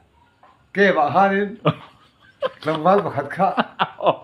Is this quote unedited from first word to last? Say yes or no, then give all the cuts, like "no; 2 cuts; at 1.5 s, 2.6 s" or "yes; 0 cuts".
yes; 0 cuts